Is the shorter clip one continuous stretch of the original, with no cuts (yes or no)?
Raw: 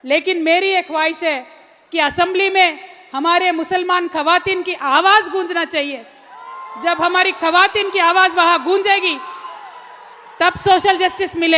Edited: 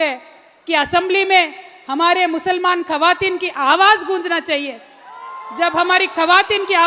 yes